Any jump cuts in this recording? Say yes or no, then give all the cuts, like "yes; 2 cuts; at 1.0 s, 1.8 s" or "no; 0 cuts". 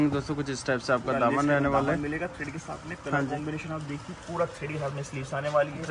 no; 0 cuts